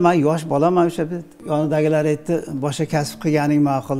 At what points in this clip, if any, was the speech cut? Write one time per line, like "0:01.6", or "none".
0:01.3